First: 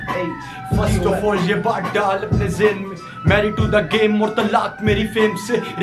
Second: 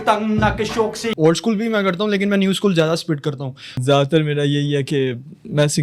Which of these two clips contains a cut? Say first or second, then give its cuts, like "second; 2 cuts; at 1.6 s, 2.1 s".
second; 2 cuts; at 1.1 s, 3.7 s